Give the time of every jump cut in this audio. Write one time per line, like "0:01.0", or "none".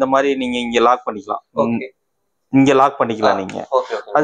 none